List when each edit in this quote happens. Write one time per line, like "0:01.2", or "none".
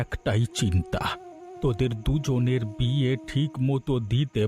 none